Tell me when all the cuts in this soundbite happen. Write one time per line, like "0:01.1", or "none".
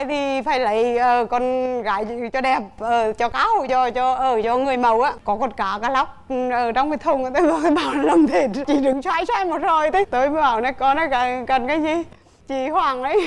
0:05.2